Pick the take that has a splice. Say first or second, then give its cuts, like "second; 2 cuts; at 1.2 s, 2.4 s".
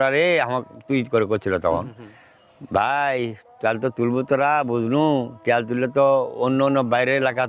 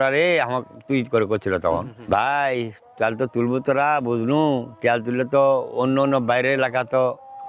second; 1 cut; at 1.9 s